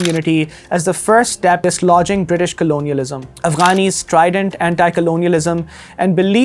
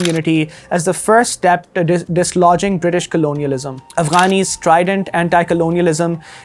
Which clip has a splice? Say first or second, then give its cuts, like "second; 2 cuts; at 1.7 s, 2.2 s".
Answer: first; 1 cut; at 1.6 s